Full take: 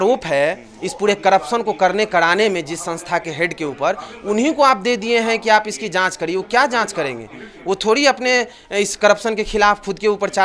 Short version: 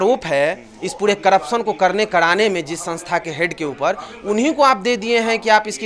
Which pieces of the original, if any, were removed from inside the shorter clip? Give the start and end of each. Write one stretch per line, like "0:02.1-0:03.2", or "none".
none